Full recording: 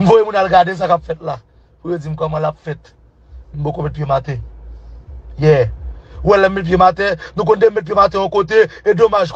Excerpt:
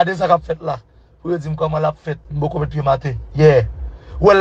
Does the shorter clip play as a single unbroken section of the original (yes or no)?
no